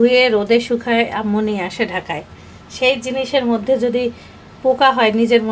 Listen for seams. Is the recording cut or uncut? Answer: uncut